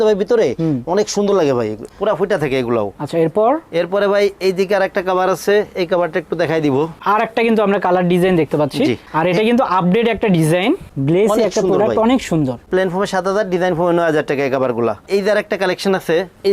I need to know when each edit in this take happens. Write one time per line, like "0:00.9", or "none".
none